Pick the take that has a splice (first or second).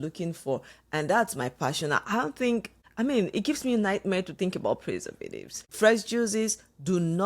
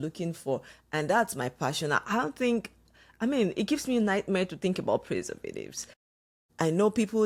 first